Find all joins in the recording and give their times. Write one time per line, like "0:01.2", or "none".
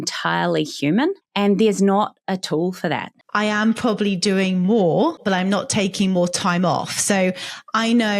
0:01.2
0:03.2
0:05.2

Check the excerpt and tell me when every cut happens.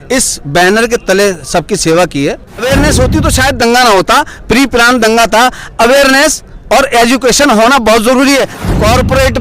0:02.5
0:08.5

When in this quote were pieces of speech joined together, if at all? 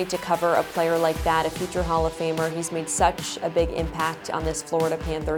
none

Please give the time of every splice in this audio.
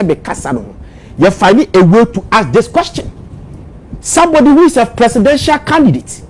none

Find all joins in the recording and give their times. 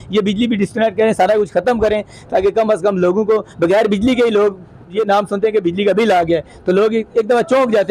0:04.8

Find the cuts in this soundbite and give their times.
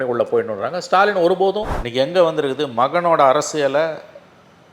0:01.7

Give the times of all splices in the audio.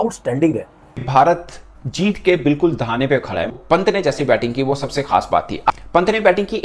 0:01.0
0:03.5

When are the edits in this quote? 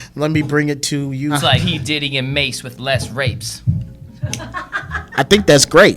0:01.4

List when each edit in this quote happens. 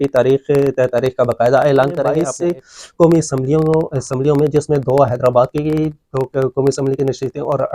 0:02.3

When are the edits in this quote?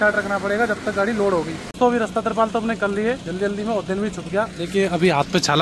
0:01.6

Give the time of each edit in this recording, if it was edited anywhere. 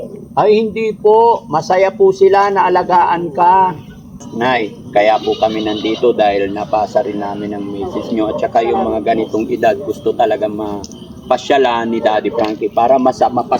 0:04.2

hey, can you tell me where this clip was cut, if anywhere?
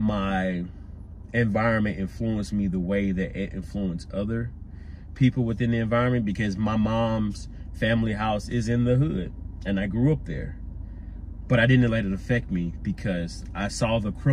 none

